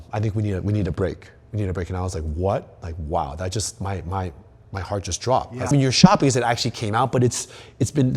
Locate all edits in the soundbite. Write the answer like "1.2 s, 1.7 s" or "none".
none